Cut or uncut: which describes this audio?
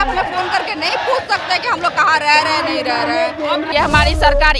cut